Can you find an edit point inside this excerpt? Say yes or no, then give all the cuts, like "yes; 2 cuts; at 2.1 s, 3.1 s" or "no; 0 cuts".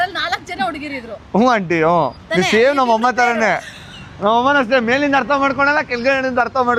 no; 0 cuts